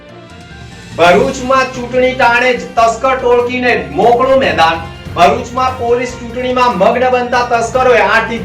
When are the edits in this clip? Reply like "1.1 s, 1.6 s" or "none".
1.0 s